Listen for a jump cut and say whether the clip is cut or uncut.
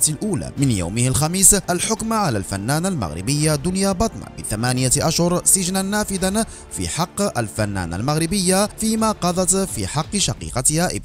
uncut